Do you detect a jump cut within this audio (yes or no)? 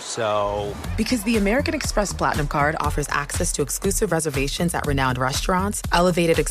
no